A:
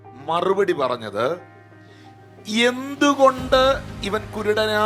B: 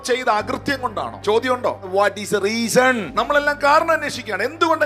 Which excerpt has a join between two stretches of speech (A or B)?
B